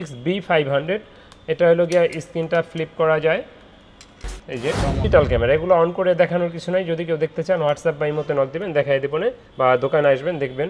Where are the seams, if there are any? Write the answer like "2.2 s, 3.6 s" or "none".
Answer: 5.0 s